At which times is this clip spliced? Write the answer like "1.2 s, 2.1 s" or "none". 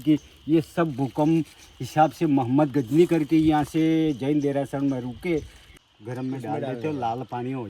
5.7 s